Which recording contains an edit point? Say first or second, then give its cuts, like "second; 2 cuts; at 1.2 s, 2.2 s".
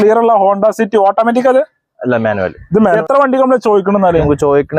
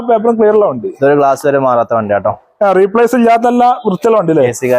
first; 1 cut; at 3.0 s